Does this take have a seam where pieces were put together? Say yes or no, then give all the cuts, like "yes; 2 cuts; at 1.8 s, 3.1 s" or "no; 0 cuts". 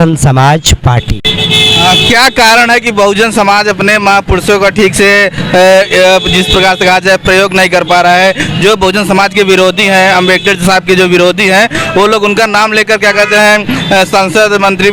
no; 0 cuts